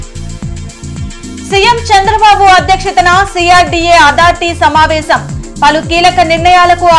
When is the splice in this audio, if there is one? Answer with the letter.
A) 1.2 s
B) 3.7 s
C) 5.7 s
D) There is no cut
A